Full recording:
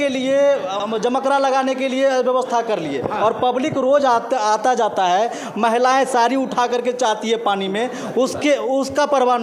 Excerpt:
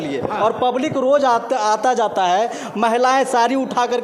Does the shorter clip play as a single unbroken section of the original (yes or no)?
yes